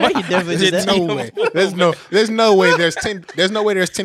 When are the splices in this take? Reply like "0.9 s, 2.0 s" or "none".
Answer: none